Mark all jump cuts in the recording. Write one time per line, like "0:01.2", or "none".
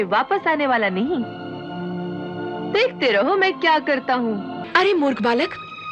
0:04.6